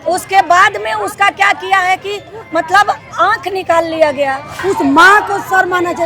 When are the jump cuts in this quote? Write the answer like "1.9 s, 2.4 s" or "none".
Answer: 4.5 s